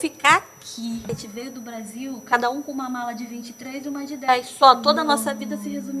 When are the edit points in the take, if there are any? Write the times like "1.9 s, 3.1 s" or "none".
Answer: 1.2 s

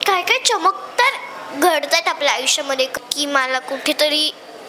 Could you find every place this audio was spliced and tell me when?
2.9 s

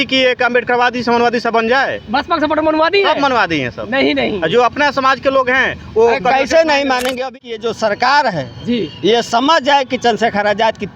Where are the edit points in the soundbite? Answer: 7.2 s

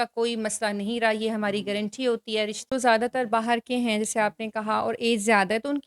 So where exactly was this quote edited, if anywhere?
2.6 s

